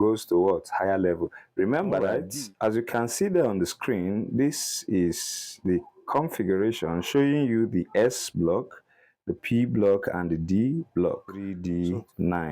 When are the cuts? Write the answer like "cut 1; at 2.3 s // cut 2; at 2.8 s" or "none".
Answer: cut 1; at 2.1 s // cut 2; at 11.5 s